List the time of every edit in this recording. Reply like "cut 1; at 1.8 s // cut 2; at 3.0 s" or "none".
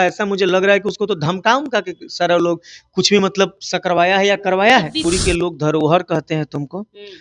cut 1; at 5.0 s